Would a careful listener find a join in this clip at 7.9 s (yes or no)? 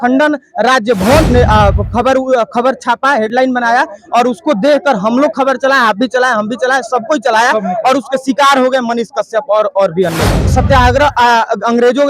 no